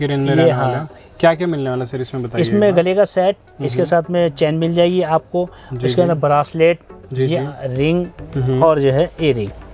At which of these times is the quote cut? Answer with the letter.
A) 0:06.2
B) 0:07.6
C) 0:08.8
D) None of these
D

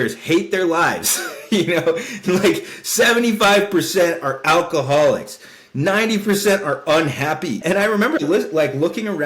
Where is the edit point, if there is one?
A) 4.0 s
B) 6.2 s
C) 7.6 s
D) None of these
C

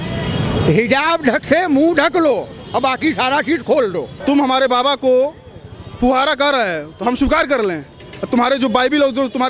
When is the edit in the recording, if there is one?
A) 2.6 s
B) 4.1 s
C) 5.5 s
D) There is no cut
B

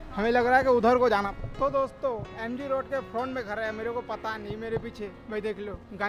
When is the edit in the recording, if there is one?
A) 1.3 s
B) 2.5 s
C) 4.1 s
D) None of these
A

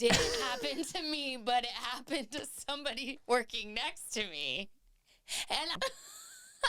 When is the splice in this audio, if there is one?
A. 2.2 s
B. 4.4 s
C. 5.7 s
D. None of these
C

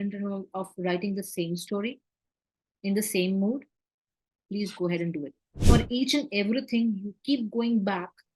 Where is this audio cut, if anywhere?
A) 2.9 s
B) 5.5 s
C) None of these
B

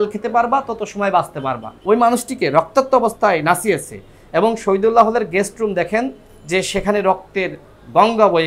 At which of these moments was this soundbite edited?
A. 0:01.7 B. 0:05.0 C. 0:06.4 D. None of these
A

